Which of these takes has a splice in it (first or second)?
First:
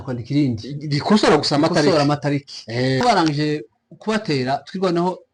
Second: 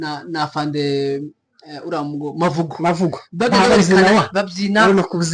first